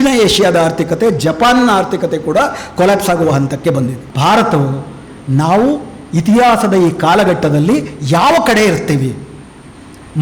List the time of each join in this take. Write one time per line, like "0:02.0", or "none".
0:04.0